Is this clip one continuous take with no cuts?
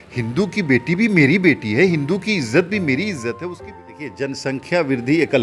no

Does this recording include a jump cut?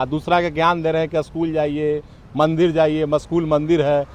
no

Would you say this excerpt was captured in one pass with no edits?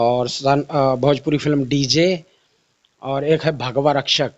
yes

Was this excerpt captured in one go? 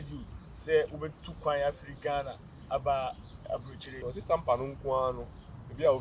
no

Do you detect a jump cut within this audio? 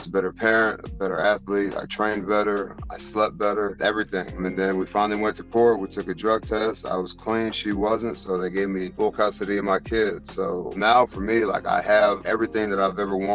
no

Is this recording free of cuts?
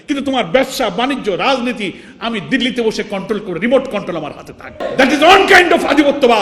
no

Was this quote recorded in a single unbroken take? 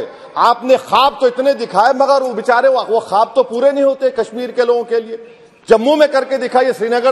yes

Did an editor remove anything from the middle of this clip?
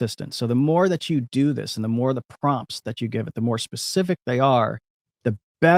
no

